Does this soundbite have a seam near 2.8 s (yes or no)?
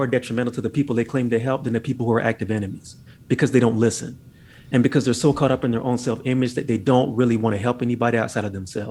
no